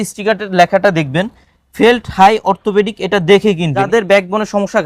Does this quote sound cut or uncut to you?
cut